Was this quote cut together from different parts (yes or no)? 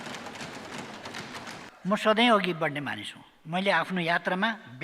yes